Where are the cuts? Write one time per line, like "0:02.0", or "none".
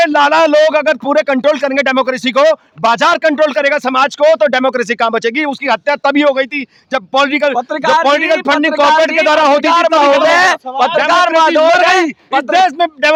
none